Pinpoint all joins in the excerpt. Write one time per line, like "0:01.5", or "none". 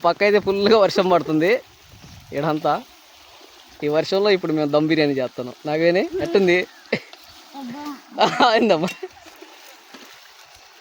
none